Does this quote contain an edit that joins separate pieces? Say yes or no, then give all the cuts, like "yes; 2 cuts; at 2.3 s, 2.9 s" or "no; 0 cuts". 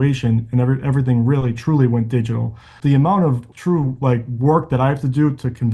yes; 2 cuts; at 2.7 s, 3.5 s